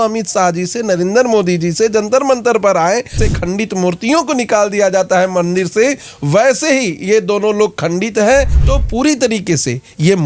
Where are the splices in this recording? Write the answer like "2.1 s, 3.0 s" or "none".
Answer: 3.3 s, 8.6 s

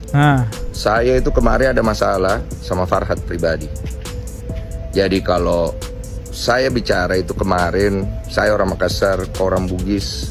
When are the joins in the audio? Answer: none

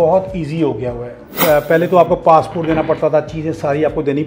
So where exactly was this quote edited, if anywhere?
none

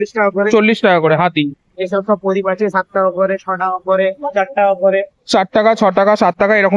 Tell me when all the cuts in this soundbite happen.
none

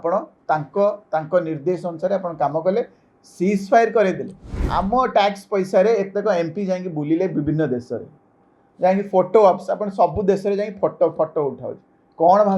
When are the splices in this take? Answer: 4.6 s

